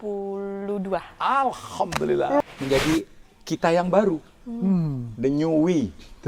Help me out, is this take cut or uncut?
cut